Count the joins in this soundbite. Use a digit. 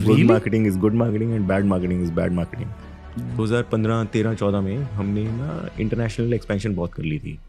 1